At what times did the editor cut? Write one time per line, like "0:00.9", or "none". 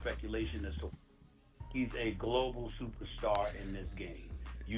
0:00.9